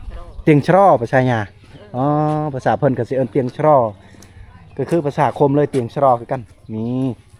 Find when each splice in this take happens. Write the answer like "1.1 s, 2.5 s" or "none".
none